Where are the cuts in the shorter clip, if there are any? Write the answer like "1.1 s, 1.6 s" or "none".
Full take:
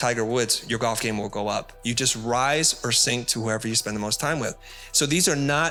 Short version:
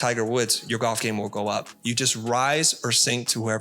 none